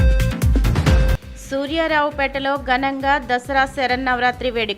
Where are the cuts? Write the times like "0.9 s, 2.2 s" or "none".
0.9 s